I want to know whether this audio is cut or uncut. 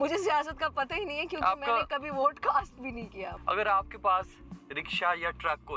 cut